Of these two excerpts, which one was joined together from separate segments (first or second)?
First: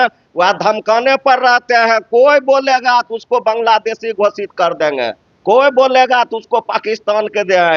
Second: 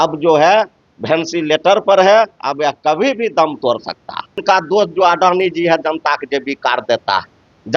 second